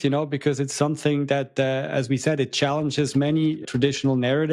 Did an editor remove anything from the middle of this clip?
yes; 1 cut; at 3.6 s

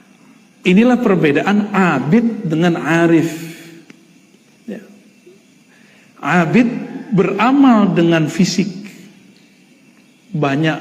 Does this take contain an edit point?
yes; 1 cut; at 0.9 s

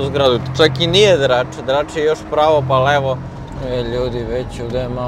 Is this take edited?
yes; 1 cut; at 3.4 s

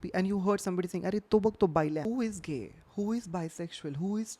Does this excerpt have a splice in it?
yes; 1 cut; at 2.0 s

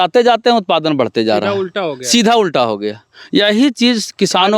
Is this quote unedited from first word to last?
yes; 0 cuts

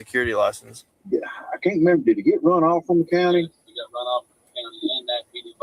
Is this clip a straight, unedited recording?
no; 1 cut; at 0.9 s

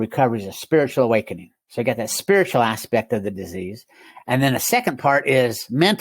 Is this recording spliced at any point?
no; 0 cuts

